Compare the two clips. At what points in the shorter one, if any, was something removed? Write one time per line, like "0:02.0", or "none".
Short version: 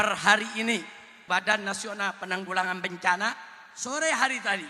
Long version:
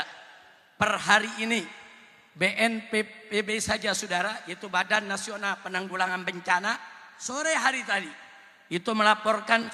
0:01.1